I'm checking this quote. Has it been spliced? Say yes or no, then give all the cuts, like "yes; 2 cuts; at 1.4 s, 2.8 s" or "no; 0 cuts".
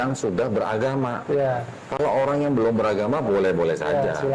yes; 1 cut; at 1.7 s